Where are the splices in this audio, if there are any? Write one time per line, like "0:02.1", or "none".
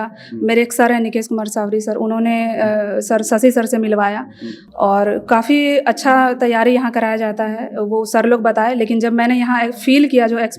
none